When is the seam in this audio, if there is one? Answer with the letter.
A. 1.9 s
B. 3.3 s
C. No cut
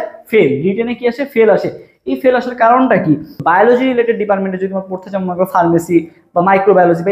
B